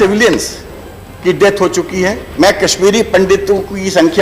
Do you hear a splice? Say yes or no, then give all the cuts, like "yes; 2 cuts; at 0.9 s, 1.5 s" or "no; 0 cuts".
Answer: yes; 1 cut; at 2.2 s